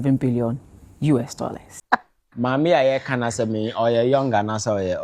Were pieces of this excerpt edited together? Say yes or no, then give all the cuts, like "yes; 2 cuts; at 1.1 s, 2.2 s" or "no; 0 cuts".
yes; 1 cut; at 1.8 s